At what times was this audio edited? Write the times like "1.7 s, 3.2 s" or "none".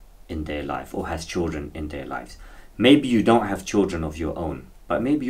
none